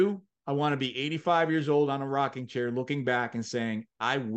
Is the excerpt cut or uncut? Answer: uncut